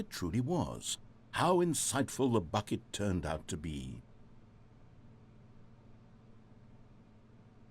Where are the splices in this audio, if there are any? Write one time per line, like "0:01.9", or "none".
0:04.0
0:06.2